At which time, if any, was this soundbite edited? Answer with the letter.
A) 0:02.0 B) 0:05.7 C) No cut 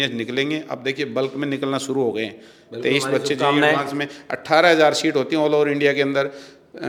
C